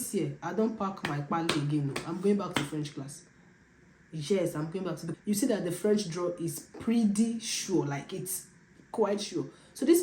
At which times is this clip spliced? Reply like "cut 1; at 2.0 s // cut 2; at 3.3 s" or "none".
cut 1; at 5.1 s